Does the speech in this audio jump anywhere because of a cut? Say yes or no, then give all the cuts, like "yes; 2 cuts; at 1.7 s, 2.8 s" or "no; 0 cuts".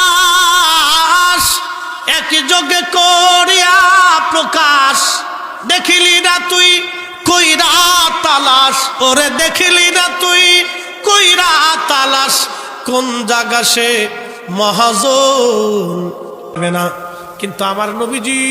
yes; 1 cut; at 16.5 s